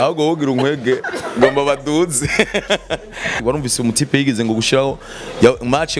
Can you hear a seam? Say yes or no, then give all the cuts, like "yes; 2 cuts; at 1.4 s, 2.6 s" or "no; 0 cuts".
yes; 1 cut; at 3.4 s